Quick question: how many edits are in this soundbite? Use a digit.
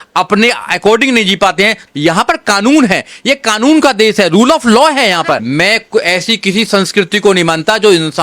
2